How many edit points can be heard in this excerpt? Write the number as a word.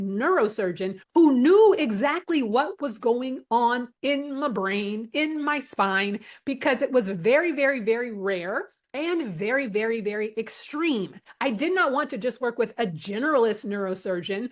zero